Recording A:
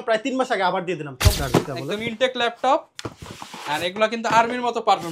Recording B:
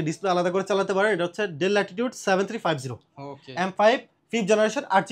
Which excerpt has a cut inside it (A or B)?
A